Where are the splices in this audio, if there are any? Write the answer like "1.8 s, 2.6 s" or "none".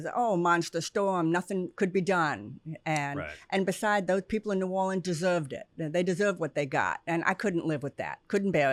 none